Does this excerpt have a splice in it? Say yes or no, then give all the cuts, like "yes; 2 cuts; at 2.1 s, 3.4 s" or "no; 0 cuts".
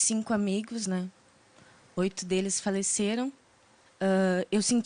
no; 0 cuts